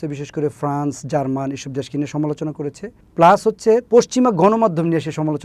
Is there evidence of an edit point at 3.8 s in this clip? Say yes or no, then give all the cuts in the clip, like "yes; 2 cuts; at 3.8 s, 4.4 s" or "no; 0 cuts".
yes; 1 cut; at 3.8 s